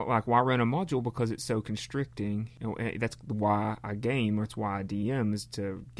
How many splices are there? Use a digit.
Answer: 1